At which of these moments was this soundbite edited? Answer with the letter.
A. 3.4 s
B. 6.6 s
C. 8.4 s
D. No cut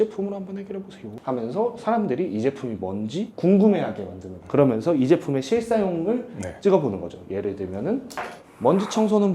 C